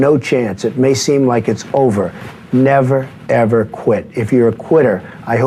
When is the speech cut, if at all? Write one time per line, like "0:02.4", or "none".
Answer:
none